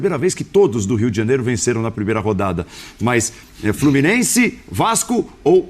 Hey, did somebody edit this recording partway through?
no; 0 cuts

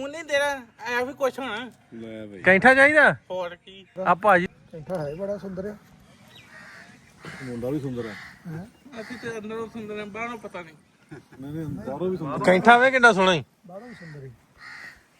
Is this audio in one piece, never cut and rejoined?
no; 1 cut; at 4.5 s

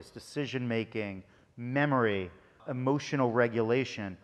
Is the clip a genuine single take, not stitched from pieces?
no; 1 cut; at 2.6 s

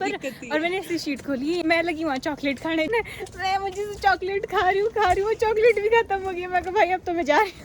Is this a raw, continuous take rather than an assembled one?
no; 2 cuts; at 1.6 s, 2.9 s

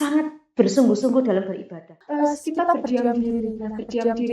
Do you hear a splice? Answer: yes; 1 cut; at 2.0 s

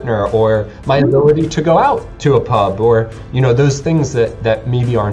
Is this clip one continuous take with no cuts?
yes; 0 cuts

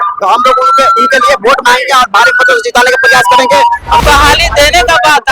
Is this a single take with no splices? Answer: no; 1 cut; at 4.0 s

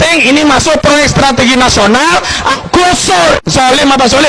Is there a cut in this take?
yes; 1 cut; at 2.5 s

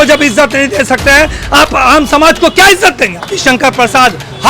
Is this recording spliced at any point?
yes; 1 cut; at 3.4 s

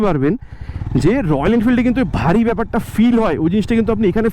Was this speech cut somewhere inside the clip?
no; 0 cuts

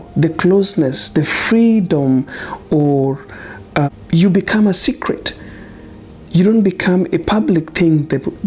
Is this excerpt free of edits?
no; 1 cut; at 3.9 s

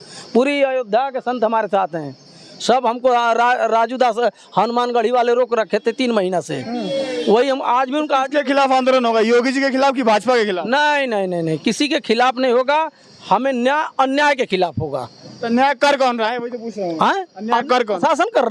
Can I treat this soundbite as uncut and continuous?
yes; 0 cuts

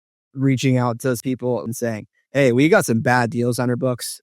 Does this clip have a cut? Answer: yes; 1 cut; at 1.6 s

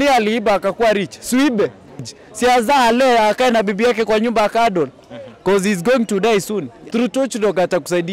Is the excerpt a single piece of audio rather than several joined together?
no; 2 cuts; at 2.1 s, 6.7 s

